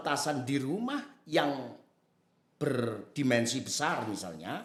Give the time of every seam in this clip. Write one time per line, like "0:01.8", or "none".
none